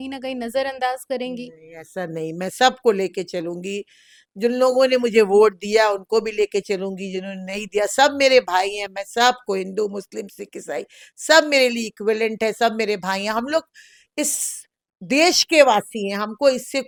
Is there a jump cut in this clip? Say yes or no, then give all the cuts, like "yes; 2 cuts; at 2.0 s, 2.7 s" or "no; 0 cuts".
no; 0 cuts